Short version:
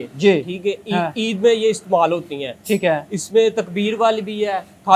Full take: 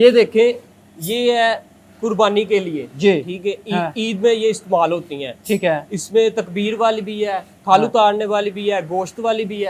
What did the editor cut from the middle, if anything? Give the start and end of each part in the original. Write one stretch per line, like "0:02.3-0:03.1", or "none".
none